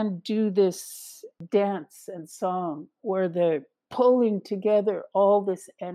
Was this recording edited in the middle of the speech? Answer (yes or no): yes